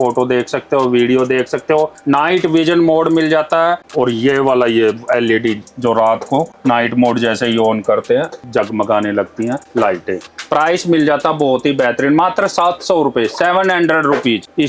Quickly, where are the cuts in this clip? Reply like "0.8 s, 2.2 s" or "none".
none